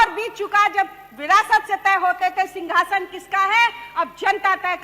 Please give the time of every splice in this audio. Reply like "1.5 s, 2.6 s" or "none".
none